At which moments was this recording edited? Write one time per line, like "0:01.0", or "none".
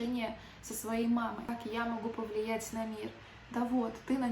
0:01.4